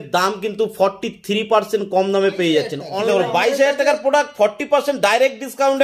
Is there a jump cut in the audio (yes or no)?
yes